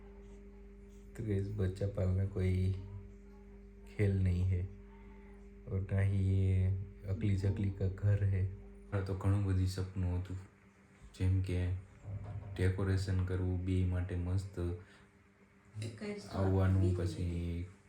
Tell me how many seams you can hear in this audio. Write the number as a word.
one